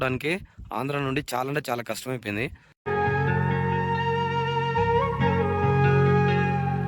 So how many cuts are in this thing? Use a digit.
1